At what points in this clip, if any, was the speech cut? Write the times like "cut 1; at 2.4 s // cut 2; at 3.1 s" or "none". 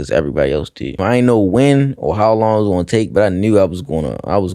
cut 1; at 1.0 s